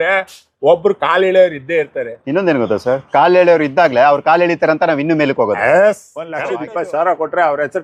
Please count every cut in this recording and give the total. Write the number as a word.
one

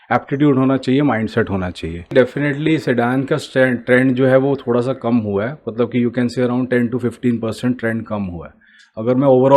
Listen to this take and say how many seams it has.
one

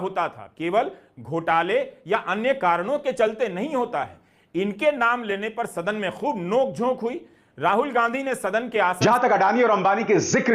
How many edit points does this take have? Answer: one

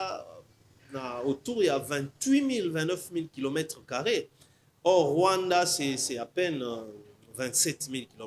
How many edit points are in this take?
zero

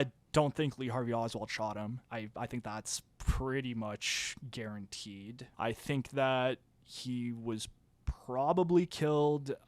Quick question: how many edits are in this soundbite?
two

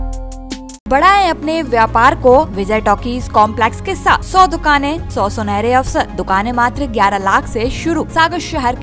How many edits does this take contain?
six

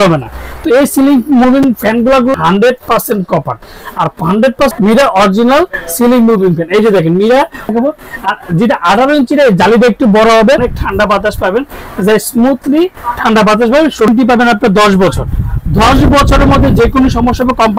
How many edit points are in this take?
five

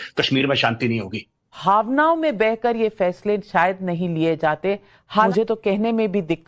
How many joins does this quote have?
two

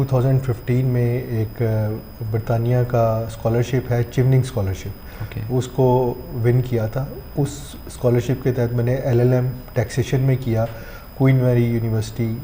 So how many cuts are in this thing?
zero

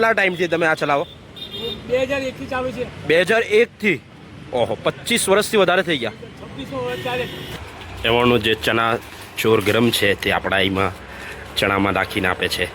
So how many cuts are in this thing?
one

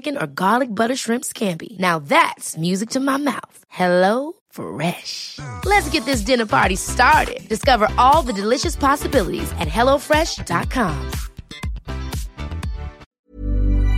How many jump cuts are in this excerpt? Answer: one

